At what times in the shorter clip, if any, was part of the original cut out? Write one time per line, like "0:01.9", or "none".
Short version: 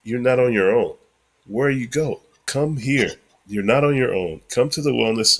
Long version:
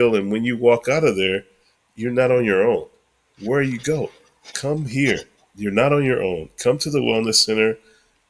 0:02.3